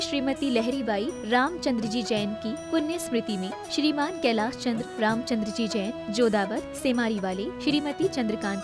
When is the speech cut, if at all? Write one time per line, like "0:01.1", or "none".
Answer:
none